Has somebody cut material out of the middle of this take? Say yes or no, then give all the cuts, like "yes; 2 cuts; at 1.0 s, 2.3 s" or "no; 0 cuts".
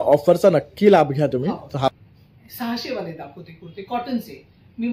yes; 1 cut; at 1.9 s